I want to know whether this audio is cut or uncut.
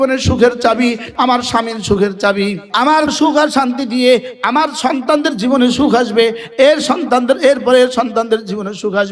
cut